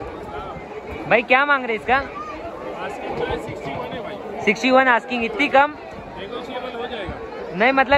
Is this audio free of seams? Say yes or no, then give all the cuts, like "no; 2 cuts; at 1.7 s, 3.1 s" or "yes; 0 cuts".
yes; 0 cuts